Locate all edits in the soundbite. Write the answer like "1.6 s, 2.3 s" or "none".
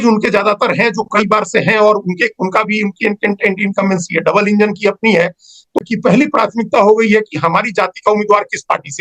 5.8 s